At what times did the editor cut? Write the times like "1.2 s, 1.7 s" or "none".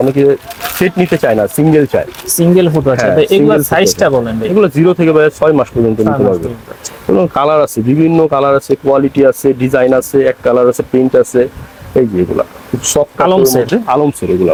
none